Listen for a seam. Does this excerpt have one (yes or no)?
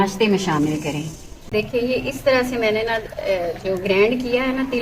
yes